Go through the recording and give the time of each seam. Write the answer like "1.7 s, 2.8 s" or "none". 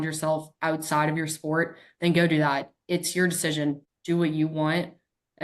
3.9 s